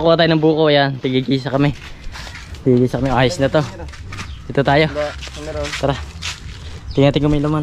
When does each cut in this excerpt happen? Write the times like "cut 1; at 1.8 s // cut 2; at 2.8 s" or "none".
none